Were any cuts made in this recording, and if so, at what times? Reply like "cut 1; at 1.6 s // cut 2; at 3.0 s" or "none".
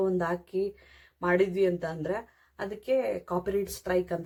none